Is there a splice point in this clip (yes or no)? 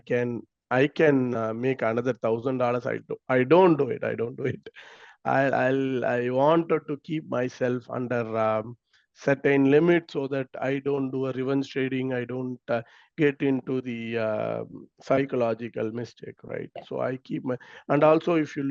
no